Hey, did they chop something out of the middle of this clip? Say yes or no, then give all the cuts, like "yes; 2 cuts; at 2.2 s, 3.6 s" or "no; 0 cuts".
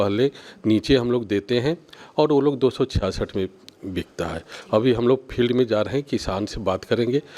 no; 0 cuts